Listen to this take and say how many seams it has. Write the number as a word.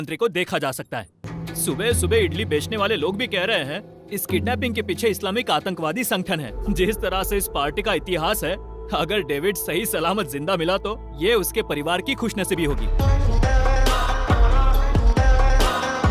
three